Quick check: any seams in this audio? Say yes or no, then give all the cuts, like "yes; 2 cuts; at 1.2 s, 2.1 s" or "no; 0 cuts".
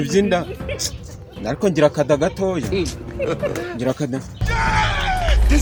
no; 0 cuts